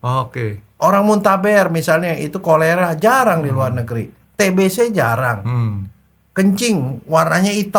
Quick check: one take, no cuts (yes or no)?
yes